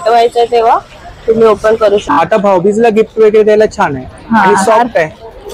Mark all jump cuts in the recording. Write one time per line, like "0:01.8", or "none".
0:02.1